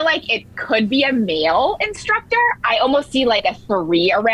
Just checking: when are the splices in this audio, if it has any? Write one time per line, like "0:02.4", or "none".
0:02.6